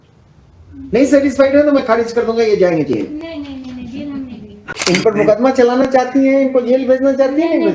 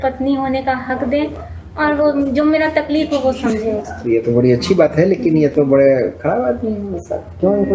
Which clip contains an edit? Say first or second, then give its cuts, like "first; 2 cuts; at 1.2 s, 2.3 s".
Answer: first; 1 cut; at 4.6 s